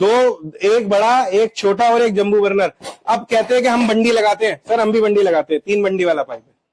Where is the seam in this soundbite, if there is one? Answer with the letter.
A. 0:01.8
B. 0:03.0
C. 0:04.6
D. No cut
D